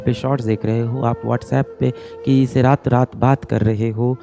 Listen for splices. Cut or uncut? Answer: uncut